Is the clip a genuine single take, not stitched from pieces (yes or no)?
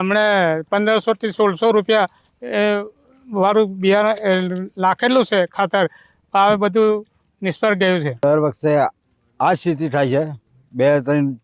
yes